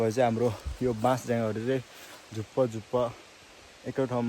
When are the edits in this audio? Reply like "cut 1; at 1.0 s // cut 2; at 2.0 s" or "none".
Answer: none